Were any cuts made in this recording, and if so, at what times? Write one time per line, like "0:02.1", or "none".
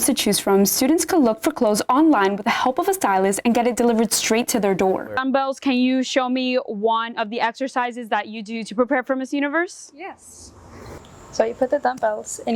0:05.2